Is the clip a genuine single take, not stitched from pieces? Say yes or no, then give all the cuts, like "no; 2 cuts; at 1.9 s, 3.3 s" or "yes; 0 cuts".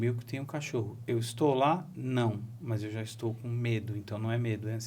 yes; 0 cuts